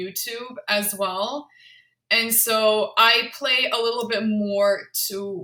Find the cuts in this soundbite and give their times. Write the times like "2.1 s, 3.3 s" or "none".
none